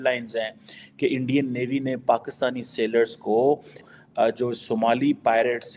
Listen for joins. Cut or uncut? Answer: cut